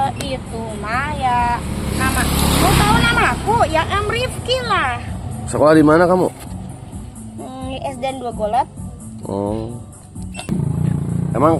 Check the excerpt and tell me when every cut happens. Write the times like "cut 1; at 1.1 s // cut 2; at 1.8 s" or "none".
cut 1; at 10.5 s